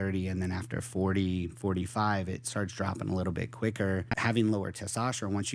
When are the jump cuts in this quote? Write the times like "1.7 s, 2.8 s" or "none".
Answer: 4.1 s